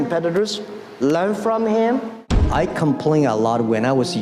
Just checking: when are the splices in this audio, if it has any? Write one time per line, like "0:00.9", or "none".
0:02.3